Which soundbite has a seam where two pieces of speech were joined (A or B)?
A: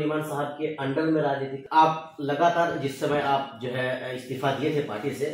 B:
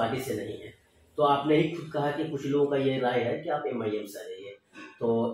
A